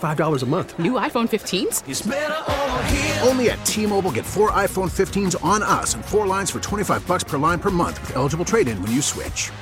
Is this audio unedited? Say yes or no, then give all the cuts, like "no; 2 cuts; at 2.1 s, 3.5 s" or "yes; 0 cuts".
yes; 0 cuts